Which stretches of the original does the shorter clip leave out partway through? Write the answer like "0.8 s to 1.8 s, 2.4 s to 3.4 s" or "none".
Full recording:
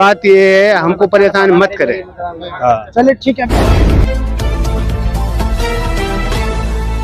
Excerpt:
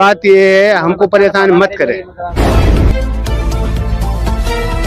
2.4 s to 3.5 s